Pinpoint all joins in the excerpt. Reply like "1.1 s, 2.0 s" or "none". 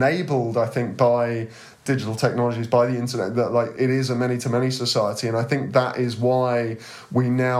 1.8 s, 3.7 s